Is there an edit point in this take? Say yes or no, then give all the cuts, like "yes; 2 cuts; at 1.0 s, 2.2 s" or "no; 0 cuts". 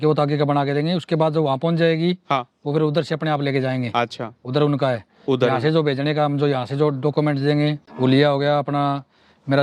yes; 1 cut; at 7.8 s